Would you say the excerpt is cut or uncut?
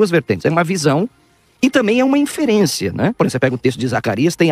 cut